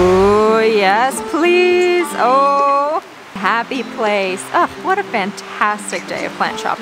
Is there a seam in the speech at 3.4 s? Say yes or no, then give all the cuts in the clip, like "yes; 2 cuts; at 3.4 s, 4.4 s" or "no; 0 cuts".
yes; 1 cut; at 3.4 s